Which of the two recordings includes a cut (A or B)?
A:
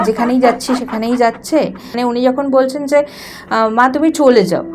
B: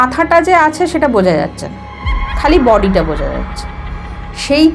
A